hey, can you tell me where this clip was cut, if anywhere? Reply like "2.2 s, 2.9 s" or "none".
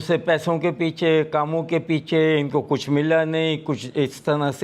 none

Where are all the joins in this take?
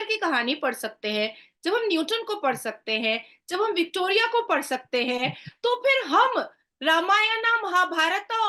none

